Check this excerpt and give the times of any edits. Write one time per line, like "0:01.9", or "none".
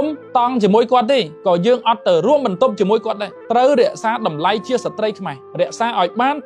none